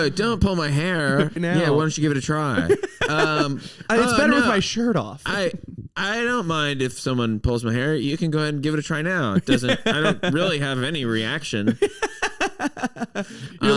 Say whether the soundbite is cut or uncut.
cut